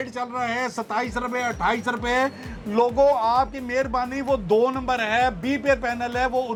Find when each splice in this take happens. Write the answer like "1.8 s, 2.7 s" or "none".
none